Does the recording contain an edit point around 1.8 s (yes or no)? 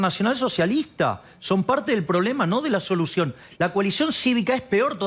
no